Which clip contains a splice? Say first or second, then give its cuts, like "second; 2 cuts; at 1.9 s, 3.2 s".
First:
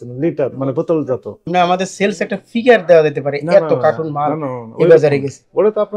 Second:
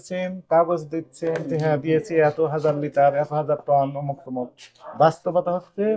first; 1 cut; at 1.4 s